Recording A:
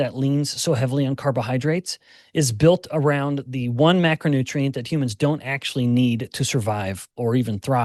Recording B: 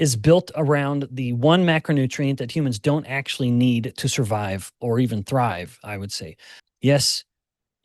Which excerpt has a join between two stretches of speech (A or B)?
B